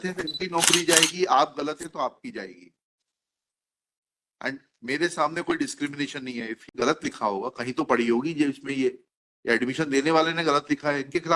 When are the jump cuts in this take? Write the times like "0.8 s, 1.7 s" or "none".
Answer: 6.6 s